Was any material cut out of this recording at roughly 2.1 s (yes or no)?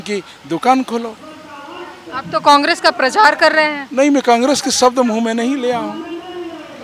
no